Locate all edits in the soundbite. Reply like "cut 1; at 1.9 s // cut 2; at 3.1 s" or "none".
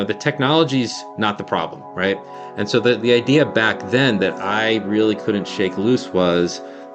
cut 1; at 2.4 s